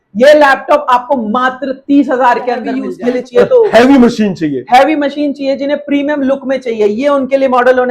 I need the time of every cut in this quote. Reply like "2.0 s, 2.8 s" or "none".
2.8 s